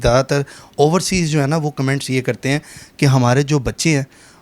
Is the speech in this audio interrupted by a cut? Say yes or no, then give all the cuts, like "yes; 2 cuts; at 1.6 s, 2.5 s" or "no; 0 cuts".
no; 0 cuts